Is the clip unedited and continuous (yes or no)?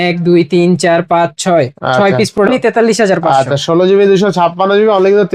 no